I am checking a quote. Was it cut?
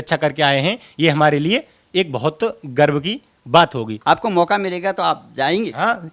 yes; 1 cut; at 3.9 s

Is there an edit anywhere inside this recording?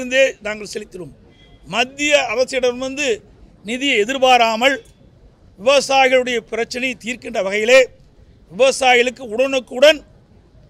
no; 0 cuts

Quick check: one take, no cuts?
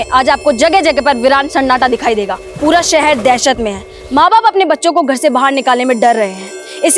no; 1 cut; at 2.4 s

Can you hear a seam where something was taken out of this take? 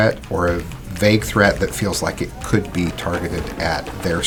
no; 0 cuts

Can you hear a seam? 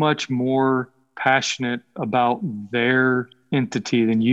yes; 1 cut; at 3.4 s

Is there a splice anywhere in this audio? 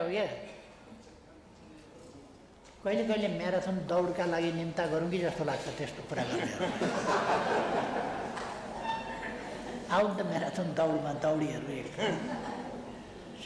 no; 0 cuts

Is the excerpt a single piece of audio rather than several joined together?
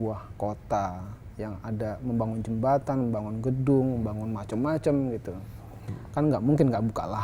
yes; 0 cuts

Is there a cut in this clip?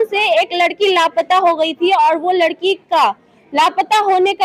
no; 0 cuts

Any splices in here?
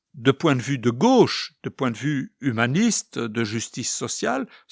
no; 0 cuts

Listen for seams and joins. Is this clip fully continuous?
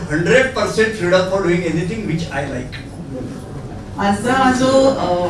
no; 1 cut; at 3.2 s

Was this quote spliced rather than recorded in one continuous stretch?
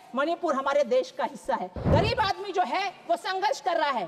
yes; 1 cut; at 1.8 s

